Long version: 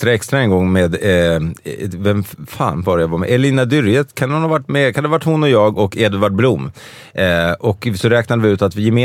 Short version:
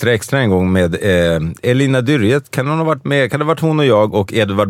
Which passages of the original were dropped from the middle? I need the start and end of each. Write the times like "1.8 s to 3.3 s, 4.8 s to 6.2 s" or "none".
1.6 s to 3.2 s